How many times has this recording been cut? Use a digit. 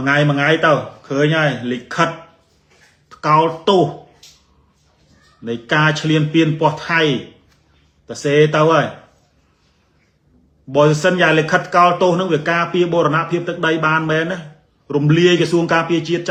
0